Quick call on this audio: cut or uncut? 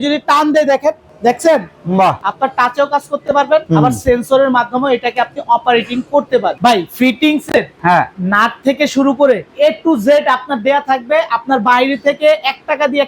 cut